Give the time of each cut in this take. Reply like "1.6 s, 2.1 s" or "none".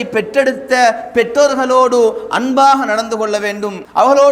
none